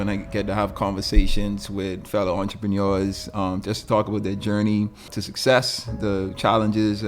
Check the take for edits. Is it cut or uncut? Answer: cut